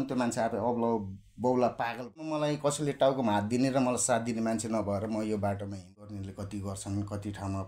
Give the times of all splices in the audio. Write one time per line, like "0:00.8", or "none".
0:02.4
0:06.0